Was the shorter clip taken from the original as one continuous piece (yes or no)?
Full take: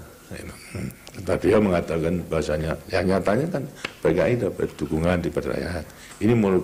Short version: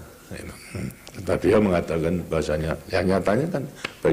yes